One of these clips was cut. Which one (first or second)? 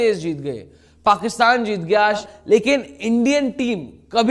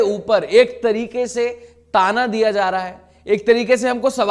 first